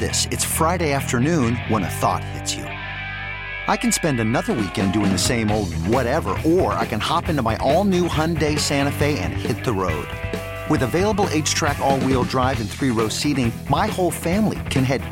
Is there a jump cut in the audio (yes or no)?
no